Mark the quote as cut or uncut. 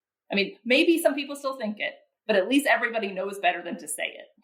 uncut